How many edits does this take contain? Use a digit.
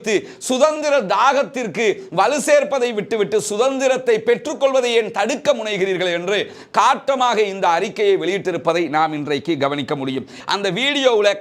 1